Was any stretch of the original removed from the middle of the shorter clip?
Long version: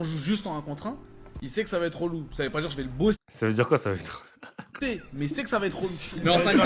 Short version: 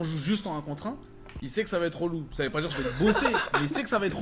yes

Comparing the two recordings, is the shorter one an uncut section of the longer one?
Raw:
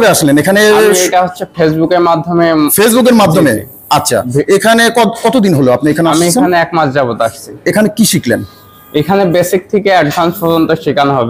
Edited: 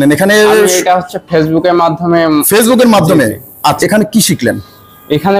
no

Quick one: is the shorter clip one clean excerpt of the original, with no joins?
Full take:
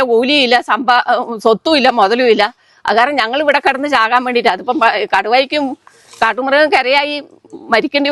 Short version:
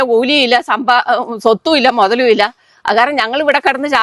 yes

